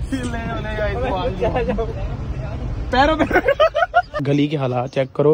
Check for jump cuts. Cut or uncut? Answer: cut